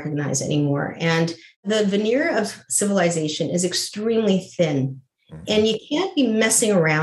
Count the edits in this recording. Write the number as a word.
one